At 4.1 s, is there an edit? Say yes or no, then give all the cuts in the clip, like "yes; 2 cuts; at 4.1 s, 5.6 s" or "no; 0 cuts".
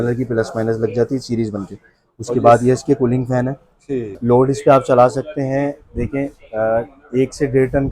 yes; 1 cut; at 4.1 s